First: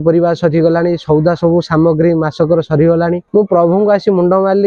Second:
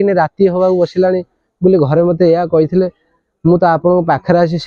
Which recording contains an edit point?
first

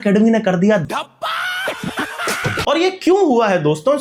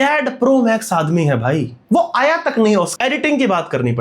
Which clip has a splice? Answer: second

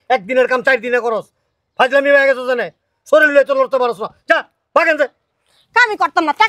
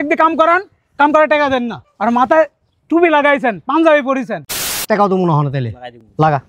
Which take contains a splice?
second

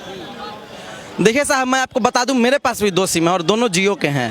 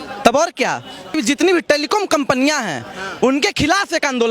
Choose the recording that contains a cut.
second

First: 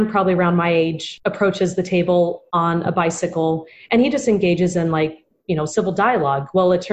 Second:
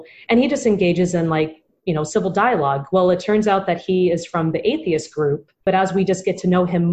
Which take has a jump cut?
first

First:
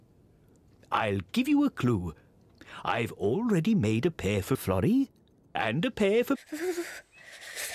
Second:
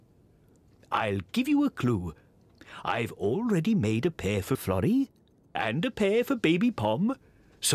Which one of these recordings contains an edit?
second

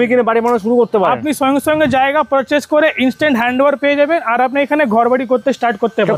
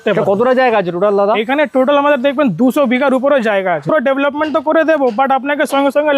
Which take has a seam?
second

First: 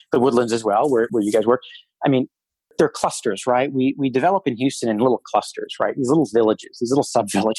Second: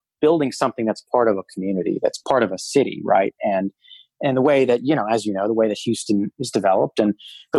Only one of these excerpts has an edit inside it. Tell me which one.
first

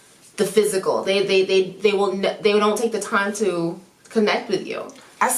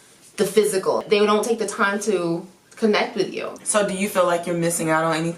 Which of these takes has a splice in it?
second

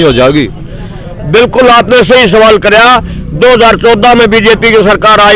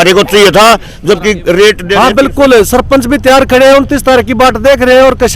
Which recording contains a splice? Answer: second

